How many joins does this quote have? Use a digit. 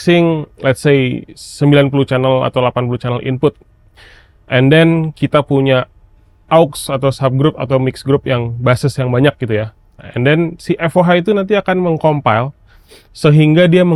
0